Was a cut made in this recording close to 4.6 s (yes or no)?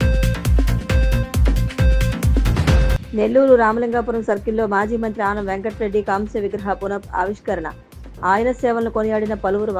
no